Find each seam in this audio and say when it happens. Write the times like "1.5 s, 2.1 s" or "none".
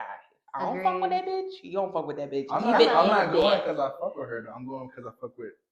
none